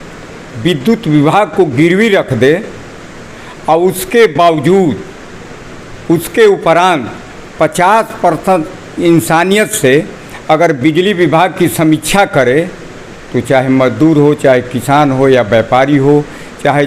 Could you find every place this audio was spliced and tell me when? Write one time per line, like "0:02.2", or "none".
none